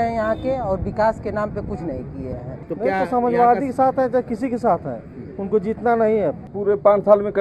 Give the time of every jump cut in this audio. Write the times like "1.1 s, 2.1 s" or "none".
2.5 s, 6.5 s